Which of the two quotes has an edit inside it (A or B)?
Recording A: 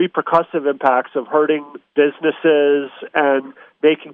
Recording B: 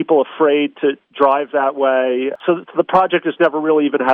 A